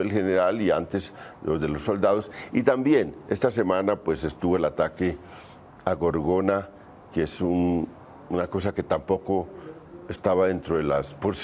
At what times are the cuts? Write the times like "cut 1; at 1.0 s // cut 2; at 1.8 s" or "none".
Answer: cut 1; at 9.4 s